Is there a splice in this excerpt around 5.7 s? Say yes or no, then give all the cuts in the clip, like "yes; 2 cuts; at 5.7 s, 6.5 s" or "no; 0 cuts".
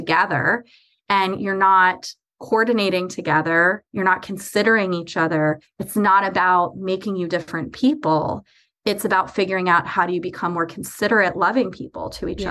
yes; 1 cut; at 5.7 s